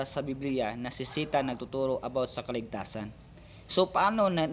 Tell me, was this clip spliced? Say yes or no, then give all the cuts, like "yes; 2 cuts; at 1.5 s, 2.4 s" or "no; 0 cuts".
no; 0 cuts